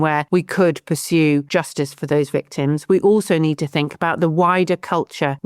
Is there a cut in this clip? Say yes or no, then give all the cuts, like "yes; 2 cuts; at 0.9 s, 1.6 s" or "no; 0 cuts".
yes; 1 cut; at 1.5 s